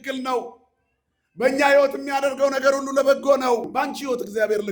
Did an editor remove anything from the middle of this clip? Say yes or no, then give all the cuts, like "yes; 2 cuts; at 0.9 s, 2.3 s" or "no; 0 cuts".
yes; 1 cut; at 3.7 s